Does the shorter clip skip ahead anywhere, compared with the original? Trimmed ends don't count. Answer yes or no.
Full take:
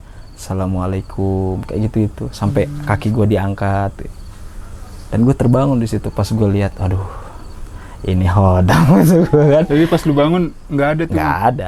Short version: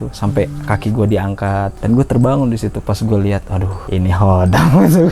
yes